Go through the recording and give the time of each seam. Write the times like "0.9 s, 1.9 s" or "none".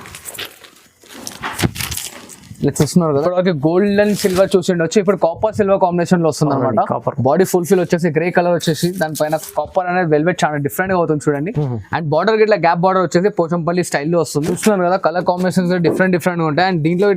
3.2 s, 14.5 s